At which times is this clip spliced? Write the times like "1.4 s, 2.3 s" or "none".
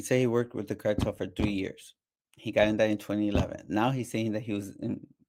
none